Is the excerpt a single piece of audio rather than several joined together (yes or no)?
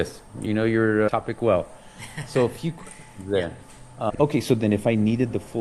no